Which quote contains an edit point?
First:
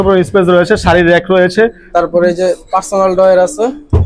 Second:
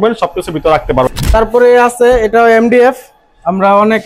second; 1 cut; at 1.1 s

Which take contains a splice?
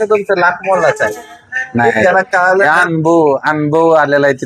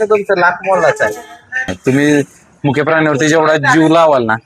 second; 1 cut; at 1.7 s

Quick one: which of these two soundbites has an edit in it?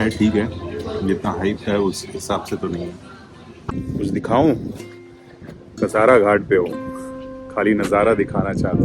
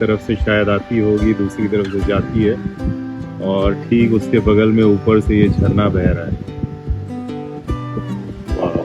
first; 1 cut; at 3.8 s

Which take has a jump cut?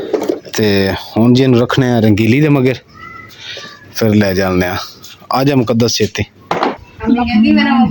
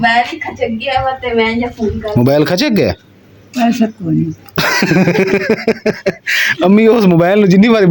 first; 1 cut; at 6.9 s

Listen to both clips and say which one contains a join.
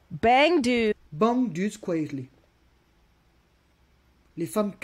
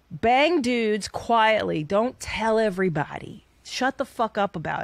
second; 1 cut; at 0.9 s

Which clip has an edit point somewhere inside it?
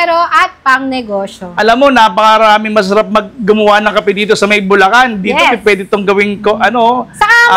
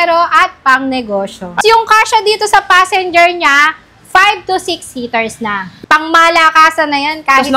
second; 2 cuts; at 1.6 s, 5.7 s

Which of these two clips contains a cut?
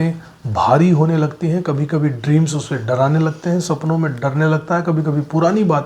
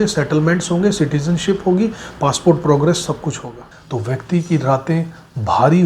second; 1 cut; at 3.7 s

